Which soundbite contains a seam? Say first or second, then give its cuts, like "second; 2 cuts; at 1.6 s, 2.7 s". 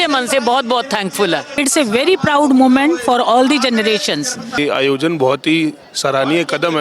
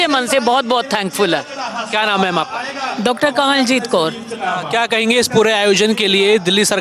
first; 2 cuts; at 1.5 s, 4.6 s